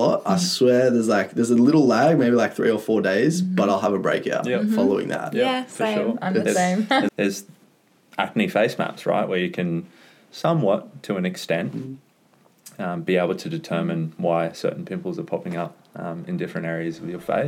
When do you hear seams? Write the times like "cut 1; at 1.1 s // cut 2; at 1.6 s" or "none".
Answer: cut 1; at 7.1 s